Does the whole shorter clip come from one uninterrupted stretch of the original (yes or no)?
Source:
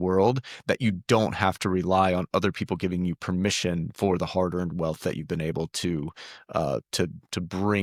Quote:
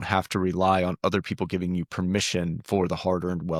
yes